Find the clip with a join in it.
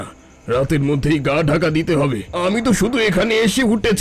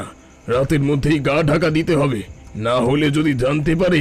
first; 1 cut; at 2.2 s

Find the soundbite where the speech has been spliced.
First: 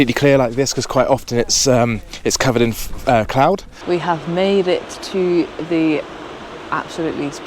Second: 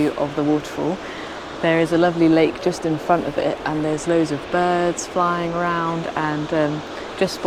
first; 1 cut; at 3.7 s

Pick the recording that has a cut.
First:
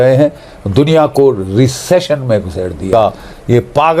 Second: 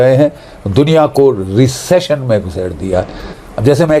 first; 1 cut; at 2.8 s

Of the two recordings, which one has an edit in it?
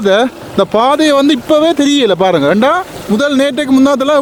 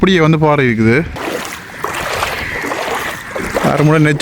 second; 1 cut; at 1.2 s

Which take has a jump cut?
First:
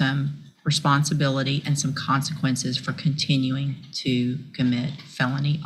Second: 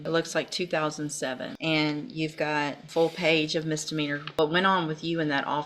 second; 3 cuts; at 1.5 s, 2.8 s, 4.3 s

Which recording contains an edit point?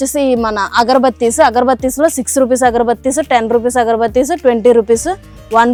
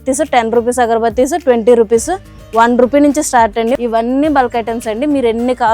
second; 1 cut; at 3.7 s

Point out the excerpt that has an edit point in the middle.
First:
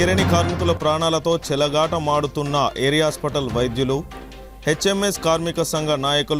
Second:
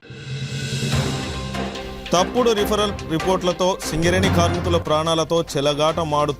second; 1 cut; at 1.9 s

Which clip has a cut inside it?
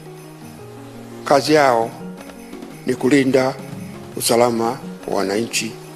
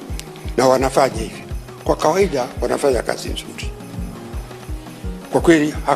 second; 2 cuts; at 3.5 s, 4.8 s

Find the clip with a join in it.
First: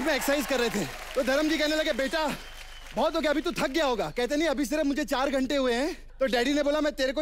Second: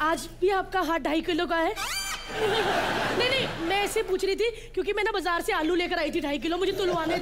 first; 2 cuts; at 1.0 s, 6.0 s

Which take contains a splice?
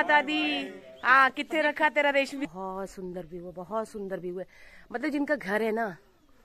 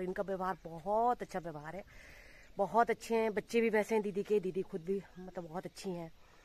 first; 1 cut; at 2.5 s

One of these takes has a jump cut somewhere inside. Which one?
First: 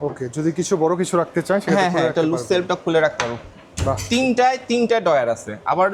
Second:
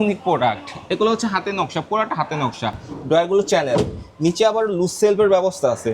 second; 1 cut; at 2.9 s

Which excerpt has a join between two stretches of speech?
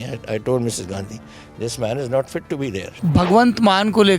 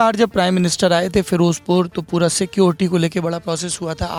first; 1 cut; at 2.9 s

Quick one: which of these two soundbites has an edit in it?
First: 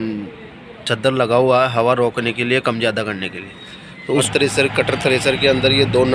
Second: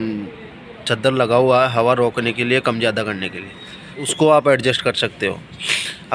first; 1 cut; at 4.2 s

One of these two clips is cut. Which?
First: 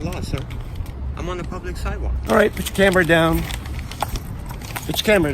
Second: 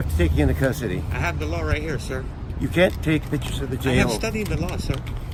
first; 1 cut; at 2.1 s

